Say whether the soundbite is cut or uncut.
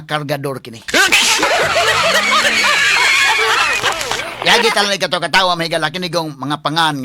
uncut